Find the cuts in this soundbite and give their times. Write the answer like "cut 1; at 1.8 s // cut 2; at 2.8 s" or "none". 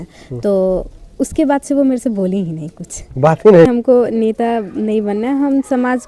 cut 1; at 4.1 s